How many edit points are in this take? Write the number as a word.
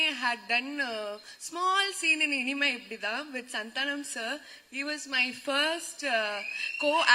zero